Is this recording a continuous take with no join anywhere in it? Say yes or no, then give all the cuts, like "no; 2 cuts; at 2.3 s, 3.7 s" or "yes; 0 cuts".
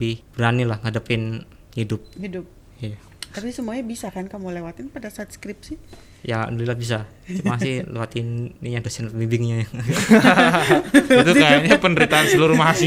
yes; 0 cuts